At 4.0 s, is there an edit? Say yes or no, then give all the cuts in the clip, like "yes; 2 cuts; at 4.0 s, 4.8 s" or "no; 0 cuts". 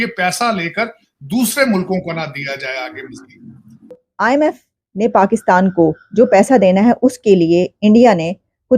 yes; 1 cut; at 4.0 s